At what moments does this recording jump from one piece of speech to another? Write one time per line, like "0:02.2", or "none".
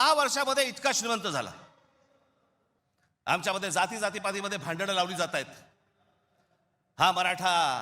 0:02.8

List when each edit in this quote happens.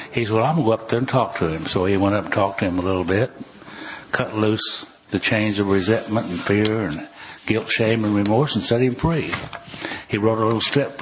none

